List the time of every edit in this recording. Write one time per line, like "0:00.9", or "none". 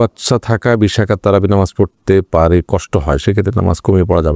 none

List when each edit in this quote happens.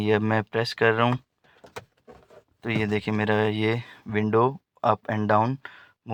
none

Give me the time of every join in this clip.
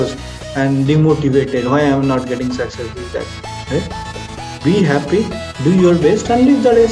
none

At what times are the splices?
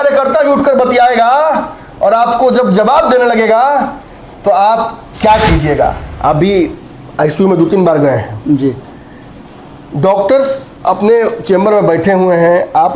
0:06.1

